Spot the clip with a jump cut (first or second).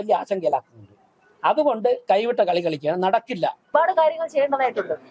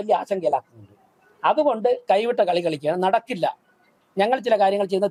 first